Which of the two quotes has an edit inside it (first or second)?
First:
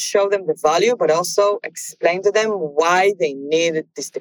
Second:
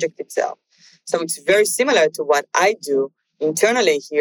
first